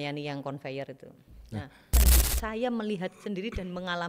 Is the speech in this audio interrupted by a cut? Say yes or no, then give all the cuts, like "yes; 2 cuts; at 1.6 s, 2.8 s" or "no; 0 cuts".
yes; 1 cut; at 1.9 s